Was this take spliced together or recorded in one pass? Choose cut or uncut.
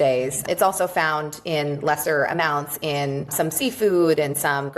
cut